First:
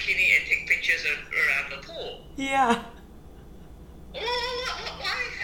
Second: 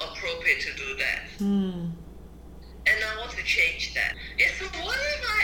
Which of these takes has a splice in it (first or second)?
second